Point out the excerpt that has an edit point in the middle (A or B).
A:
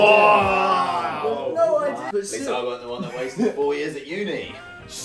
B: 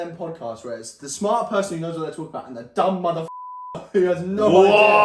A